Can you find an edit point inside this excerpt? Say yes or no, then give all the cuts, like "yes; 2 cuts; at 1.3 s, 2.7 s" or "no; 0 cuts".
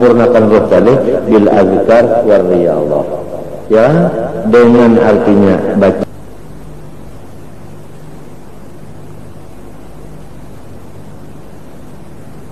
yes; 1 cut; at 6.0 s